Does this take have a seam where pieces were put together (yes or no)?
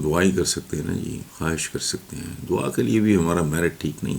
yes